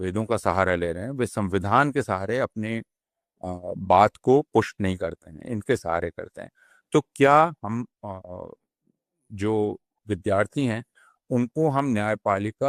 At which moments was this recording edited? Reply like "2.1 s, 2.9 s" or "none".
none